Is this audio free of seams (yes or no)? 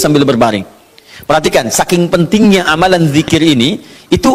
yes